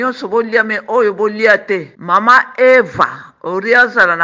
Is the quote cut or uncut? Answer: cut